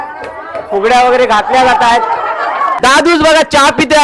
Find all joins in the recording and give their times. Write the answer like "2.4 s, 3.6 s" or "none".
2.7 s

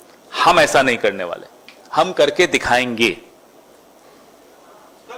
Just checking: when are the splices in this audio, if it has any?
none

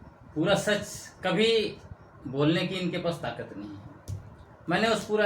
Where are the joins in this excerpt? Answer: none

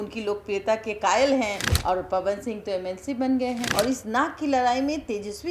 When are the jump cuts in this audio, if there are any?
1.7 s, 3.7 s

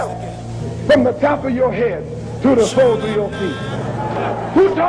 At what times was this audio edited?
none

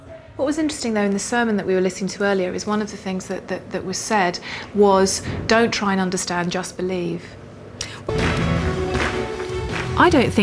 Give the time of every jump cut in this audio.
none

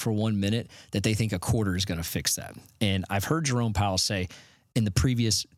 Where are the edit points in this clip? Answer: none

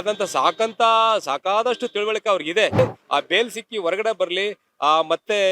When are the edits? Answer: 2.8 s

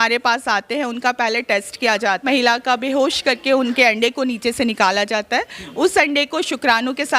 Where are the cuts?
2.2 s

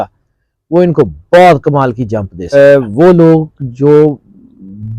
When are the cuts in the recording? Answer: 2.5 s

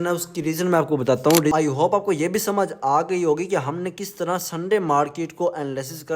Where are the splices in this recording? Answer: 1.5 s

